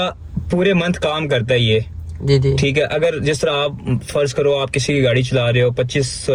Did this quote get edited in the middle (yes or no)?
no